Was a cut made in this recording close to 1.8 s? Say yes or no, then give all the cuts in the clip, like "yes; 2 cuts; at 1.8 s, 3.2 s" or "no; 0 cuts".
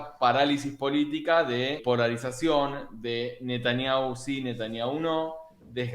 yes; 1 cut; at 1.8 s